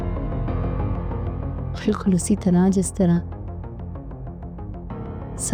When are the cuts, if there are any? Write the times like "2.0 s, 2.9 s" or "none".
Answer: none